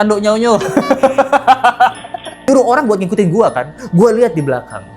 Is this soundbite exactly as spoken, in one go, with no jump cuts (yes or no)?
no